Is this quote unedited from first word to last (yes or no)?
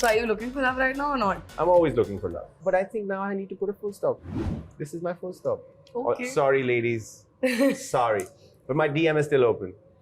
no